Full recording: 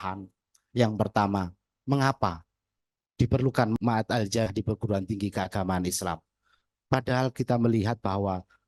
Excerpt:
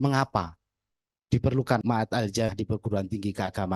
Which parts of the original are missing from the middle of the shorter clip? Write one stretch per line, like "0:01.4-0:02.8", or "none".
0:03.7-0:03.8